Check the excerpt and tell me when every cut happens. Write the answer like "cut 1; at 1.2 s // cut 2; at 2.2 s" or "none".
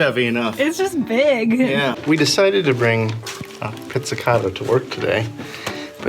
cut 1; at 2.0 s